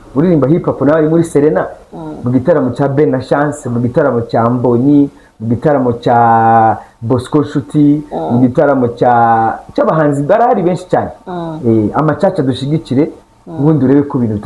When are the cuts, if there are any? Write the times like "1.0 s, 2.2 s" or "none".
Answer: none